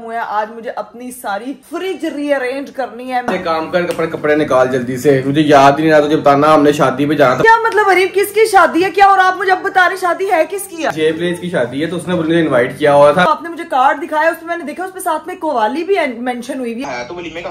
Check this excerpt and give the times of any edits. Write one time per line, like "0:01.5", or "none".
0:03.2
0:07.4
0:10.9
0:13.3
0:16.8